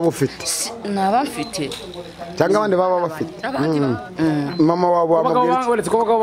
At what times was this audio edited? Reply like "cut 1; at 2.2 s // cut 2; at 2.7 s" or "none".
cut 1; at 3.4 s